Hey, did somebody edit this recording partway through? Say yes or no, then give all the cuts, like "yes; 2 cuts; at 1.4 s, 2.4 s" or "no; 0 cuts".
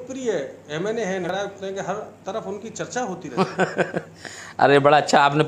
yes; 1 cut; at 1.2 s